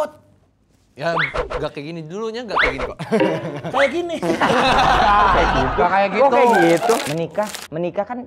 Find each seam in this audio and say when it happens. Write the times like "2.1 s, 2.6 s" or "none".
7.0 s